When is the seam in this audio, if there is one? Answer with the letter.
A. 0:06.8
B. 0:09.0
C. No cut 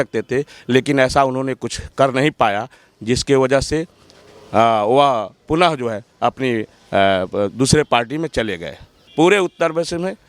B